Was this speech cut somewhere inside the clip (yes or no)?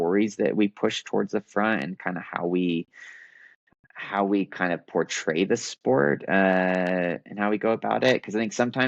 no